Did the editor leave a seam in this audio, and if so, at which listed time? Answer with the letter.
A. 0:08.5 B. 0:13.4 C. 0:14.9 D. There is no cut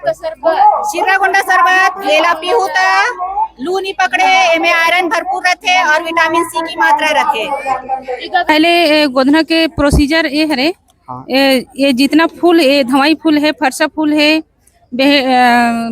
A